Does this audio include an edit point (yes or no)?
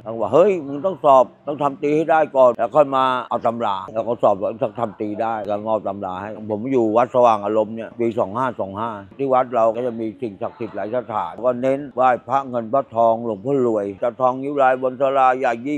no